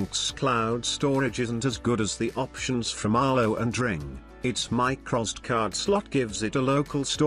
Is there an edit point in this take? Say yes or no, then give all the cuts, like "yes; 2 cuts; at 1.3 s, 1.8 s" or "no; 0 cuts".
yes; 1 cut; at 4.4 s